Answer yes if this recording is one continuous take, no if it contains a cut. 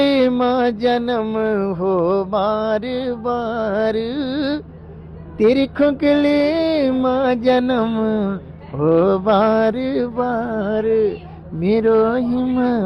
yes